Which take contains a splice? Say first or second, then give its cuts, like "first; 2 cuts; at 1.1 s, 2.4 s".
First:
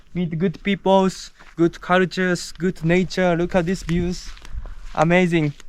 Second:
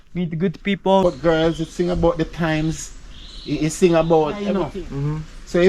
second; 2 cuts; at 1.0 s, 4.6 s